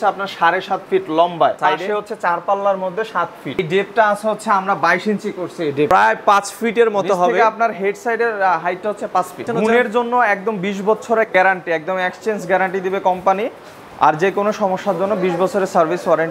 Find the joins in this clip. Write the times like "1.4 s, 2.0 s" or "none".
1.6 s, 3.6 s, 5.9 s, 9.4 s